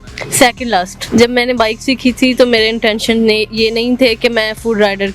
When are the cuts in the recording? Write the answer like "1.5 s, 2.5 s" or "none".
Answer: 1.0 s

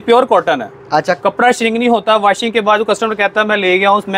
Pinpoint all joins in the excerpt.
none

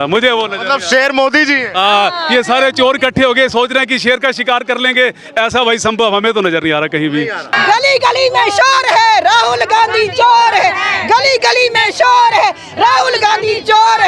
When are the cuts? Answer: 7.5 s

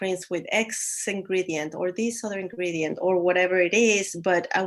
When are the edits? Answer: none

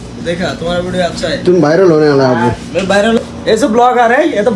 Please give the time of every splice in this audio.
3.2 s

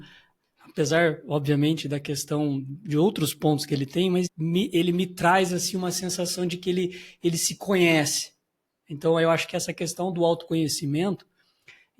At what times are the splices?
4.3 s

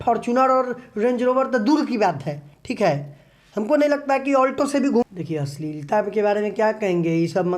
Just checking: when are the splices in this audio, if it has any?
5.0 s

